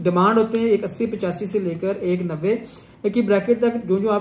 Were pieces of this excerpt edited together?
no; 0 cuts

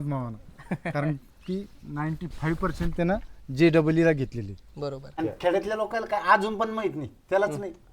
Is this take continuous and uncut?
no; 1 cut; at 5.1 s

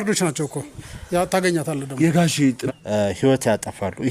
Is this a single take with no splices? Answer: no; 1 cut; at 2.4 s

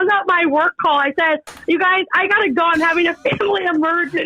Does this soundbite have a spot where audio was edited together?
no; 0 cuts

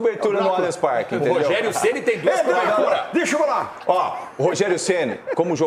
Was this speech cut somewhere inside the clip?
no; 0 cuts

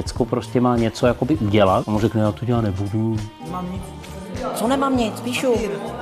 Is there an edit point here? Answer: yes; 2 cuts; at 1.8 s, 3.4 s

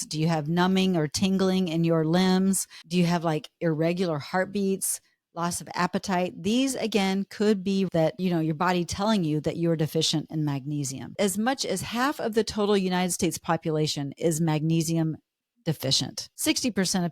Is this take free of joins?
no; 4 cuts; at 2.8 s, 7.9 s, 11.1 s, 16.3 s

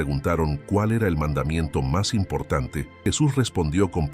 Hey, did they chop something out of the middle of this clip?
yes; 1 cut; at 2.8 s

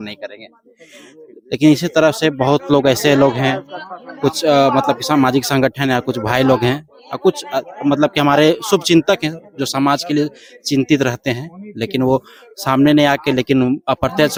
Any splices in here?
no; 0 cuts

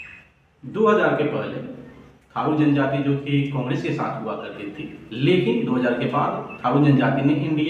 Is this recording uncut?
yes; 0 cuts

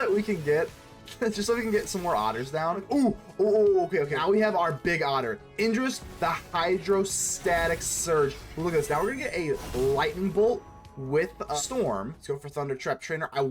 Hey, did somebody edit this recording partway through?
yes; 4 cuts; at 2.8 s, 4.2 s, 11.5 s, 12.2 s

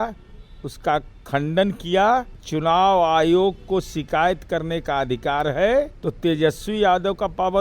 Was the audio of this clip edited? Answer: yes; 2 cuts; at 2.4 s, 6.0 s

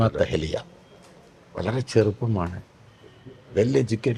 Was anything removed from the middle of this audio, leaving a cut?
no; 0 cuts

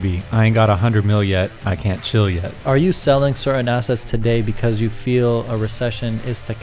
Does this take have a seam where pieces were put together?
yes; 1 cut; at 2.5 s

